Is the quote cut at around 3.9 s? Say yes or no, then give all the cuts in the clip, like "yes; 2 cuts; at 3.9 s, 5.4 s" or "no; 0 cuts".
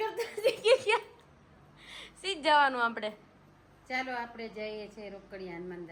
no; 0 cuts